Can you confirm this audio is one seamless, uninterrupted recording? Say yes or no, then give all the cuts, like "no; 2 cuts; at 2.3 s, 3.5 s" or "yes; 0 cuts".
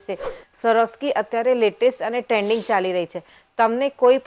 yes; 0 cuts